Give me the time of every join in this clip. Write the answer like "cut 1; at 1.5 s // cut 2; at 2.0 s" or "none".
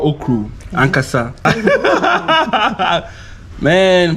cut 1; at 1.4 s